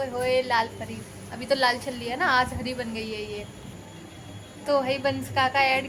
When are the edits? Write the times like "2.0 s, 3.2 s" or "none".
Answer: none